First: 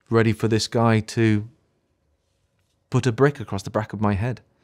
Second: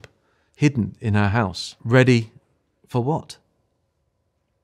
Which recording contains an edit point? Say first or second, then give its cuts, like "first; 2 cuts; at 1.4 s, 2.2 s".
second; 1 cut; at 1.7 s